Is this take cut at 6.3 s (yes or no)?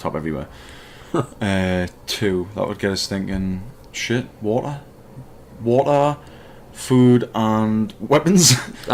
no